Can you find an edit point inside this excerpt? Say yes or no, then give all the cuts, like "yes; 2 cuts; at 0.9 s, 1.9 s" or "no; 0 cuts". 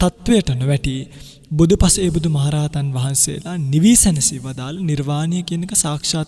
no; 0 cuts